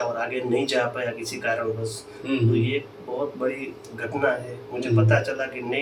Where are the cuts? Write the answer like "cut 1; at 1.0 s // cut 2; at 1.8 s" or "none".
none